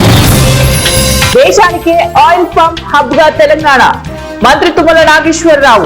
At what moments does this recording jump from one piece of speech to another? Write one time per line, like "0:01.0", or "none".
0:01.3